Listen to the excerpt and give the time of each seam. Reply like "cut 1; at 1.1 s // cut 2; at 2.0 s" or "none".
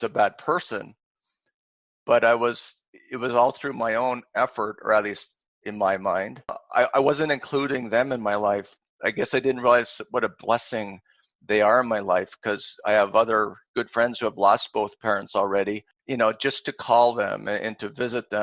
cut 1; at 6.6 s // cut 2; at 15.9 s